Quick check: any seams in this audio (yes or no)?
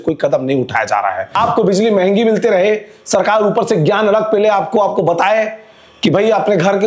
yes